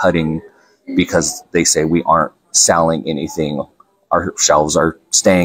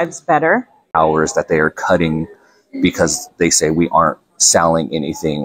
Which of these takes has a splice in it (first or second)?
second